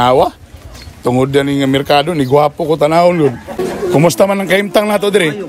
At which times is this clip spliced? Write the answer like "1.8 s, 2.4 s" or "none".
3.5 s